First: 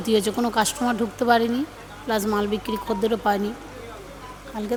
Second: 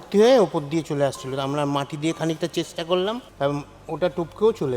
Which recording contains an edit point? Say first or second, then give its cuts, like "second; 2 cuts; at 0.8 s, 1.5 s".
second; 1 cut; at 3.3 s